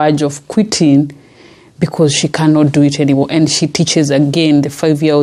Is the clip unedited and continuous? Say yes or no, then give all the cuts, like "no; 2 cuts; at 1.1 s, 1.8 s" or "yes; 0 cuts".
yes; 0 cuts